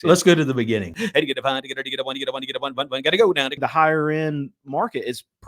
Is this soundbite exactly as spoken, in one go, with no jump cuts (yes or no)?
no